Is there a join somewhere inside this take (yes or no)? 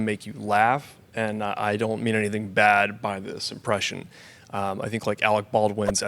no